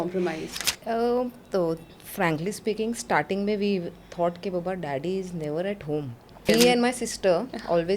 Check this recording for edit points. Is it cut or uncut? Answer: cut